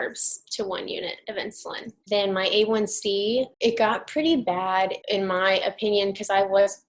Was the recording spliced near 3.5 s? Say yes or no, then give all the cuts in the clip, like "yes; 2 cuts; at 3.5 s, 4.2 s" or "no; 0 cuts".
yes; 3 cuts; at 1.9 s, 3.5 s, 5.0 s